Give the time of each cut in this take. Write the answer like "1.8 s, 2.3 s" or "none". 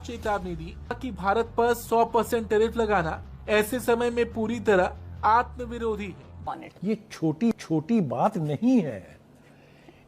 6.5 s